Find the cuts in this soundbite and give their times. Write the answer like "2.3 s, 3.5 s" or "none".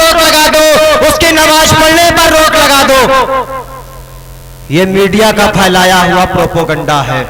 none